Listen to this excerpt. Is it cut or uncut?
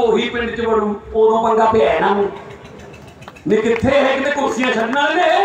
uncut